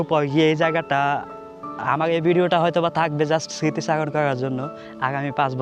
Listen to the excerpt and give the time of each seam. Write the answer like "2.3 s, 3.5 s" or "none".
none